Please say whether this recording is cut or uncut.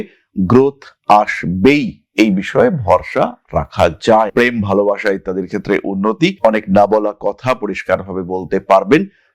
uncut